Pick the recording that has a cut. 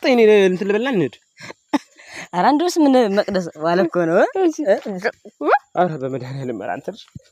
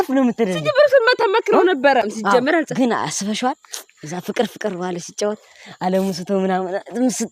second; 1 cut; at 2.0 s

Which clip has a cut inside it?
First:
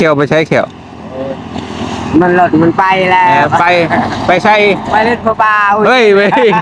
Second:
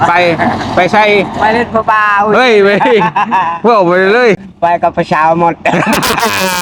second; 1 cut; at 4.4 s

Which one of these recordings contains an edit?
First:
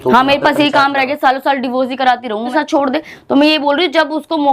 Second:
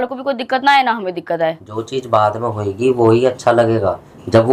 first; 1 cut; at 2.5 s

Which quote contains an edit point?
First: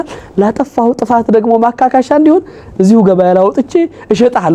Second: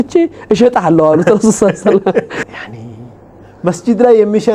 second; 1 cut; at 2.4 s

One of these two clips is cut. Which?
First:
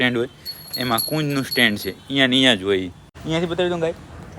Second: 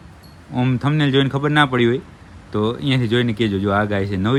first; 1 cut; at 3.1 s

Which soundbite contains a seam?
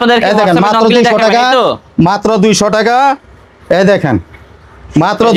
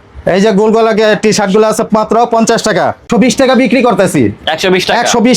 second; 1 cut; at 3.1 s

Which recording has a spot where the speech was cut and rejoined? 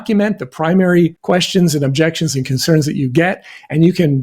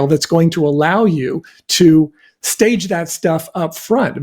first; 1 cut; at 1.2 s

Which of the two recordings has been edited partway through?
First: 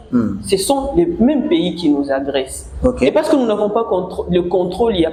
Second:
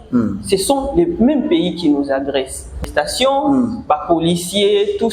second; 1 cut; at 2.7 s

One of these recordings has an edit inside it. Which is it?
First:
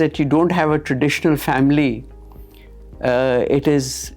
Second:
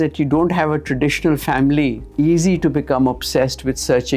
second; 1 cut; at 2.0 s

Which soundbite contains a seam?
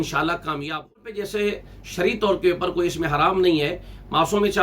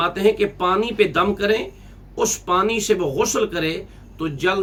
first; 1 cut; at 1.1 s

